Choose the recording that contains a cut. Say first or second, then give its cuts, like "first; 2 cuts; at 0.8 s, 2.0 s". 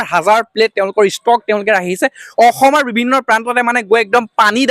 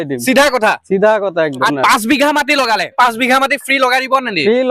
second; 2 cuts; at 1.7 s, 3.0 s